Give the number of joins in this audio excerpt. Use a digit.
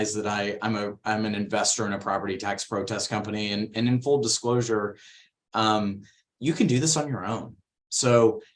0